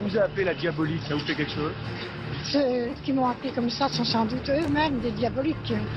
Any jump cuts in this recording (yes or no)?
no